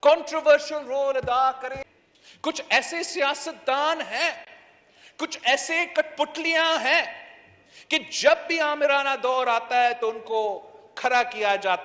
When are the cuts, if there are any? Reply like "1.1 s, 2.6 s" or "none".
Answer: 1.8 s